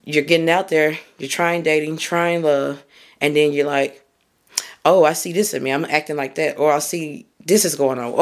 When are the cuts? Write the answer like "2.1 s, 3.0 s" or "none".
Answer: none